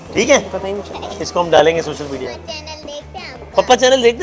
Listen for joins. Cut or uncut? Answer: cut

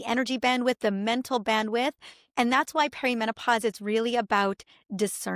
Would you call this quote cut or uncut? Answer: uncut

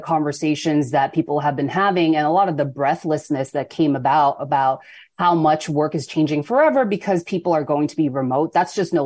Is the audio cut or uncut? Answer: uncut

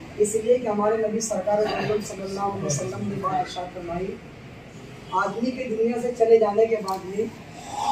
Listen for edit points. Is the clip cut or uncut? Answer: uncut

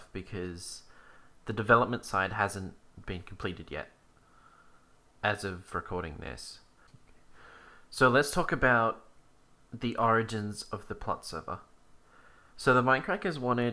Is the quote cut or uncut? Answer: cut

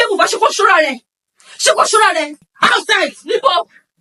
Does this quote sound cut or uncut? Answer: cut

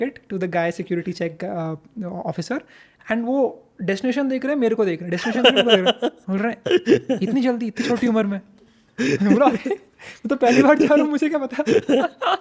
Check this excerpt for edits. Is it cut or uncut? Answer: uncut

